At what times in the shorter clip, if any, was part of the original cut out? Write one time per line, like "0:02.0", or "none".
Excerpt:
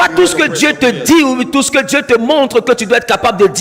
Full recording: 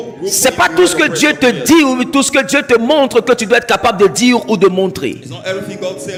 none